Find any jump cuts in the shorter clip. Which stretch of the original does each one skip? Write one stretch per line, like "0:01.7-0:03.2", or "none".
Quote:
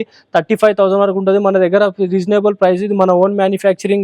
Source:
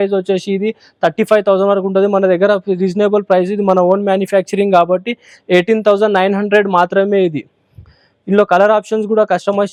none